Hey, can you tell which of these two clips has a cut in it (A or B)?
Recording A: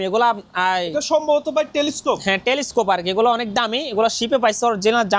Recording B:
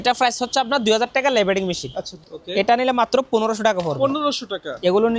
B